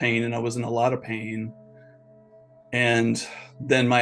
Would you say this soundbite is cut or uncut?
uncut